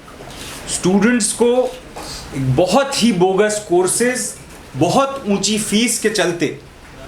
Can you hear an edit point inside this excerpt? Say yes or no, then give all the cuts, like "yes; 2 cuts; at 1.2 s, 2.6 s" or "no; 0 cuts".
no; 0 cuts